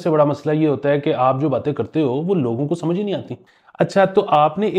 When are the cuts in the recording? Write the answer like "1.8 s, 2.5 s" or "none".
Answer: 3.4 s

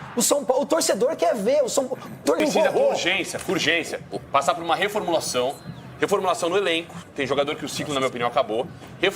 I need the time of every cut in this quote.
2.4 s

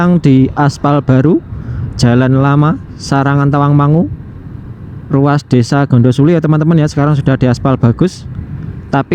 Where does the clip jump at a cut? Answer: none

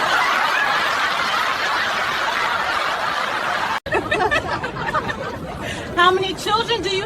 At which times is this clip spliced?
3.8 s

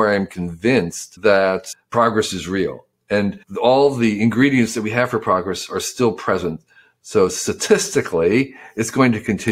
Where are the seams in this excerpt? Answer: 1.0 s, 1.7 s, 3.1 s

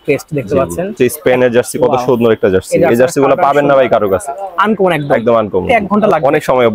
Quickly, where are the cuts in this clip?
1.0 s, 5.7 s

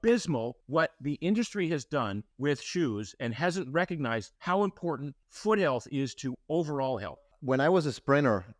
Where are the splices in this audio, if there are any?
7.3 s

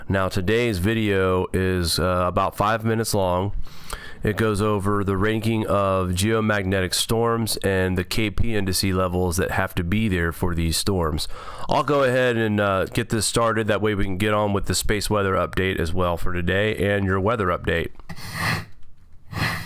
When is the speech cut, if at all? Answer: 8.6 s

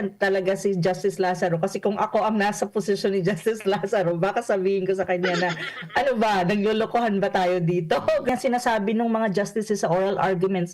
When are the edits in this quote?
8.3 s

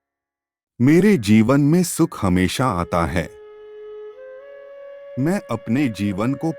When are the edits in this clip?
3.3 s, 4.7 s

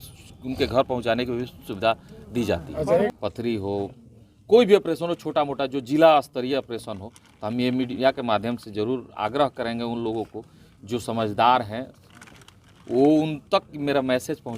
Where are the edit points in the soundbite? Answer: 3.1 s

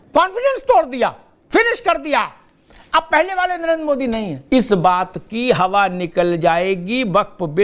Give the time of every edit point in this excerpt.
1.3 s, 4.4 s

